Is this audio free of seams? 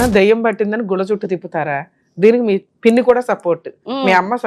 no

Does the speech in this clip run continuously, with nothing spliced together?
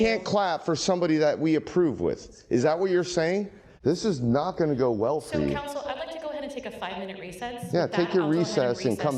no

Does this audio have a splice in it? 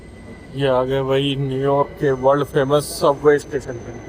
no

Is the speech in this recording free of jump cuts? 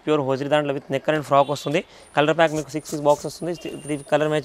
yes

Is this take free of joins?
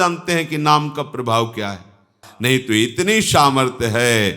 no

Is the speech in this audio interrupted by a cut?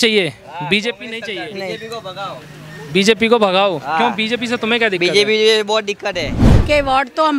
yes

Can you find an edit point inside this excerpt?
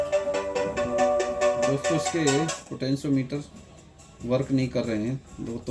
no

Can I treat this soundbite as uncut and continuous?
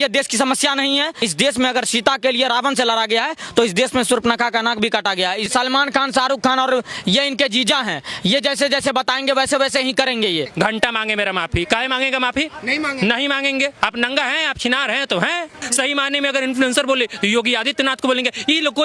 no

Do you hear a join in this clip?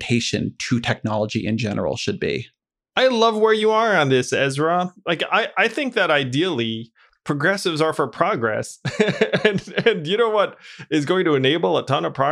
no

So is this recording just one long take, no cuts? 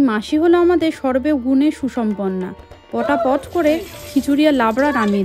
yes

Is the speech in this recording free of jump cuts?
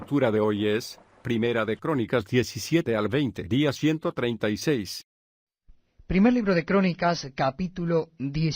yes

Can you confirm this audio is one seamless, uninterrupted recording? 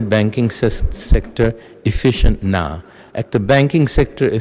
yes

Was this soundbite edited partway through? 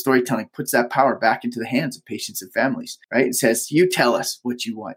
no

